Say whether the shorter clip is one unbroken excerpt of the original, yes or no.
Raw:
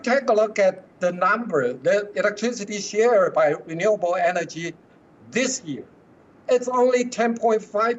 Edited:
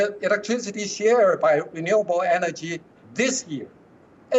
no